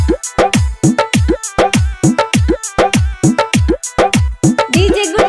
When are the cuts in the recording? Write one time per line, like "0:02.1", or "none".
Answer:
none